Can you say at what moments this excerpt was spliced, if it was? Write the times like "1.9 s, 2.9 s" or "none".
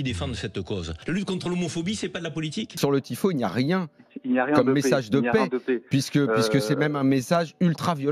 0.9 s, 2.7 s

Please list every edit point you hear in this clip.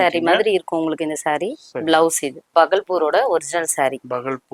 2.5 s

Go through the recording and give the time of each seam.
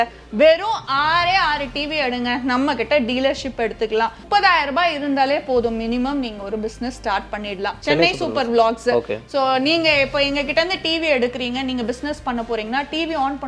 4.2 s, 7.8 s

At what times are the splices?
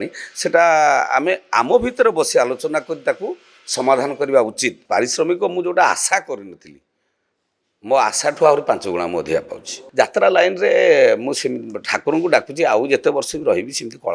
4.8 s, 9.8 s

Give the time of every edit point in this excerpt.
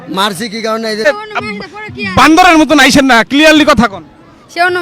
1.0 s

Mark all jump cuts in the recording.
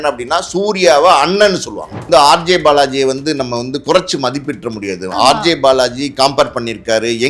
2.0 s

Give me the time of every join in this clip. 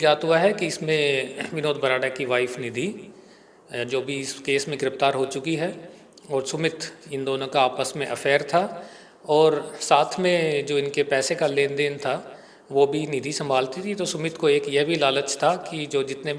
none

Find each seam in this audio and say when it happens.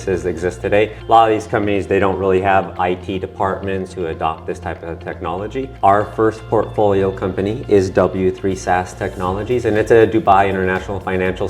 1.0 s, 2.7 s, 3.9 s, 5.6 s

